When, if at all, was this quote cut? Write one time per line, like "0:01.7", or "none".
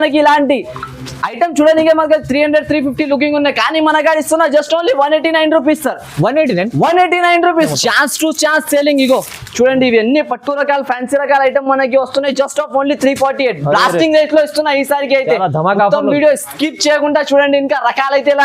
0:07.7